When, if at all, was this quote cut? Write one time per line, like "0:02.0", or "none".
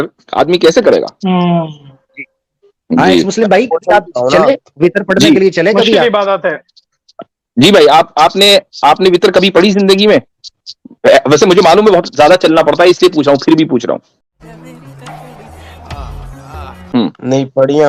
none